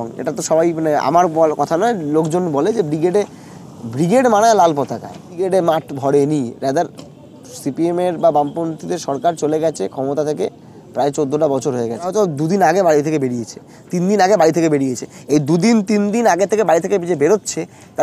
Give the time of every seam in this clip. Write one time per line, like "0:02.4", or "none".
0:05.4
0:12.1

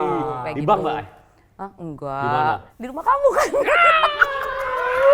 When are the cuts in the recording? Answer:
0:02.7

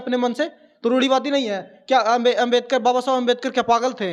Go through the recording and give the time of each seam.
none

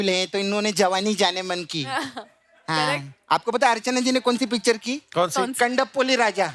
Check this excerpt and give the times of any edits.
none

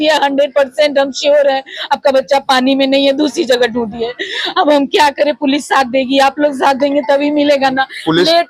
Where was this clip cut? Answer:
none

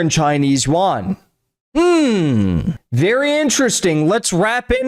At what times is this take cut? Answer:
none

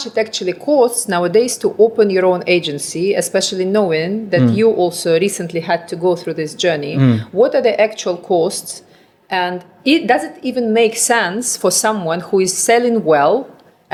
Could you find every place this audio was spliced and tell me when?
none

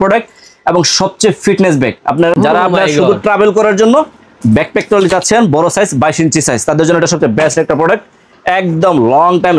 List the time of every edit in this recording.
0:02.3

